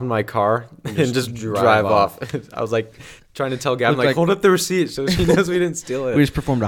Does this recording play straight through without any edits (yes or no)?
yes